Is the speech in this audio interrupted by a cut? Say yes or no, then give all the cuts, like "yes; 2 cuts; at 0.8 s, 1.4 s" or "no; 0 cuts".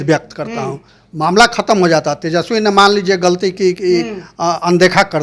no; 0 cuts